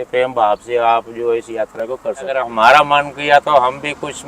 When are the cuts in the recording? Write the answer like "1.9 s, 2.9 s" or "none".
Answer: 2.5 s